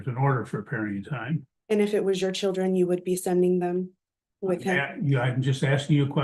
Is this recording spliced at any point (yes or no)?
yes